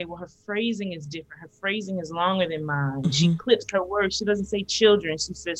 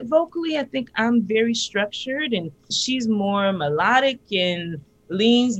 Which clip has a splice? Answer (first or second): second